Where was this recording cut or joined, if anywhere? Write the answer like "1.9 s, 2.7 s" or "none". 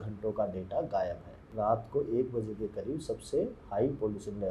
1.4 s